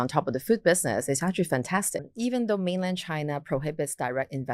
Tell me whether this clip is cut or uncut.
cut